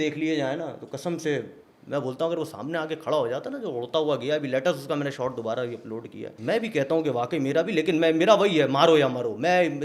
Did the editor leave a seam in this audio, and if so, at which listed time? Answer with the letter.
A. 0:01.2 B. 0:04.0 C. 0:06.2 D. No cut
C